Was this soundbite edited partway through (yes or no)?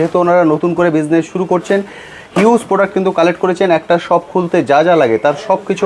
no